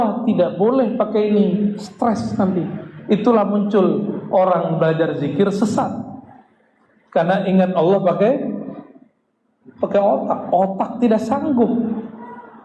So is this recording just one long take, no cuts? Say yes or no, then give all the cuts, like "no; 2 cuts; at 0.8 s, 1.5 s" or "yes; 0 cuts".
yes; 0 cuts